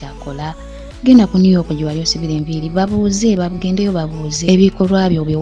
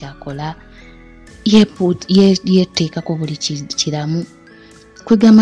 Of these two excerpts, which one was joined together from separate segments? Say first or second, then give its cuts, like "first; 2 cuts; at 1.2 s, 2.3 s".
first; 1 cut; at 0.9 s